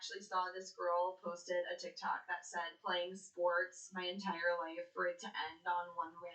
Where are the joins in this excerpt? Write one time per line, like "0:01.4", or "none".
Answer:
none